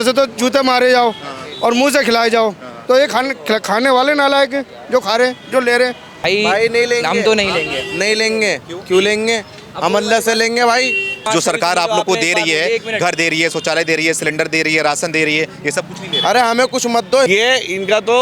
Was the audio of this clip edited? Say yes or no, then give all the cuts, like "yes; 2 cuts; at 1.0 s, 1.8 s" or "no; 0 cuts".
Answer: yes; 3 cuts; at 6.1 s, 11.2 s, 17.3 s